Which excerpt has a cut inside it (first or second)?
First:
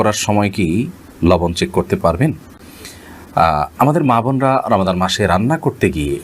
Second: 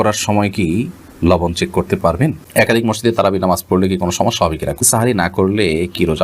second